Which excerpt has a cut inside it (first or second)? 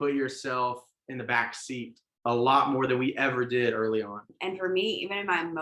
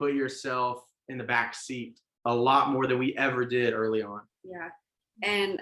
first